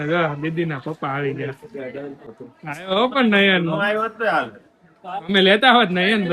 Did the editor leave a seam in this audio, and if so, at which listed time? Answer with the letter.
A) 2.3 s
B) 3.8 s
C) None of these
A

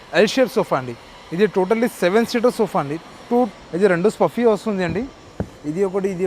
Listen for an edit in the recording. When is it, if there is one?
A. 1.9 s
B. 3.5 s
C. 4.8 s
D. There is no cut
B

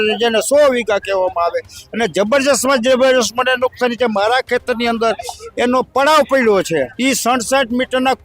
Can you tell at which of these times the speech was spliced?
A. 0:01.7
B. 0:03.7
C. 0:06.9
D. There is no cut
C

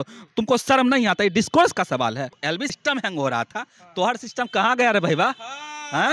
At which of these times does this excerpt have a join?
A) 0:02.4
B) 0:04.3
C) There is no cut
A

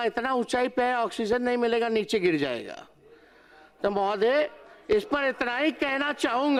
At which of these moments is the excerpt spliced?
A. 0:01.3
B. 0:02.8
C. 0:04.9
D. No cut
D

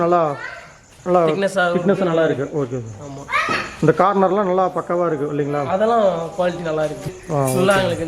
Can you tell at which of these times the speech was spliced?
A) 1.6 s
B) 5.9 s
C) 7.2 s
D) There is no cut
C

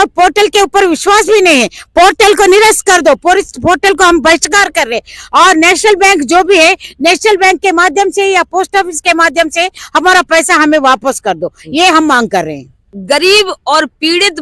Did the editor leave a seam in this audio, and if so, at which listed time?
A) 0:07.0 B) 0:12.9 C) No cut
B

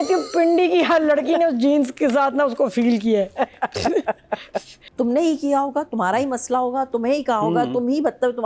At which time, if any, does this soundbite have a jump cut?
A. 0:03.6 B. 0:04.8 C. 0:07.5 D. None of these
B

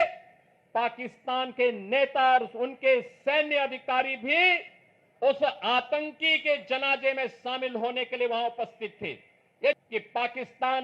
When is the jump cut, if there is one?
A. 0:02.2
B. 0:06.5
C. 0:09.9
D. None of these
C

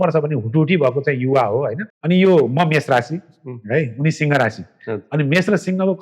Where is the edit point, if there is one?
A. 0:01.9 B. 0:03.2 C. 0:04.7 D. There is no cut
A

